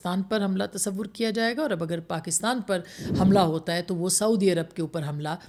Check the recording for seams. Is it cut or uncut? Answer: uncut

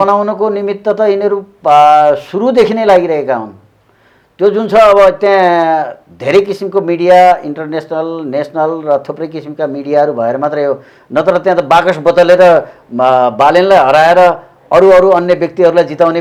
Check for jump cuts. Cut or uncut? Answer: uncut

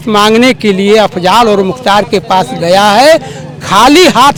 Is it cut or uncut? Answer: uncut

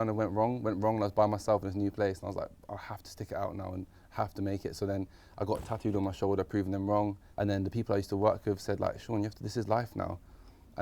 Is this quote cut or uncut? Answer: cut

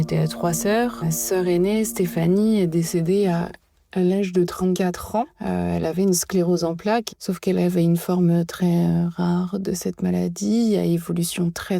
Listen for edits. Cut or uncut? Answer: cut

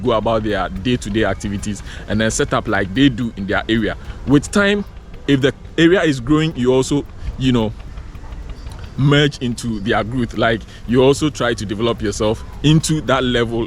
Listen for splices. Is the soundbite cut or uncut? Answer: uncut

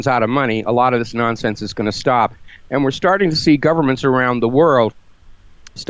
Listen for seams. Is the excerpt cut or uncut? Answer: uncut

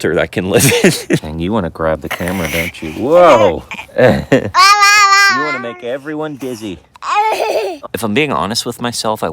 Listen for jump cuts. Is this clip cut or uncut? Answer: cut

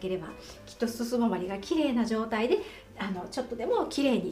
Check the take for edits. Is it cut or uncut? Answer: uncut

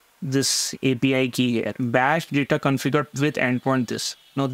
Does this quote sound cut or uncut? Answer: cut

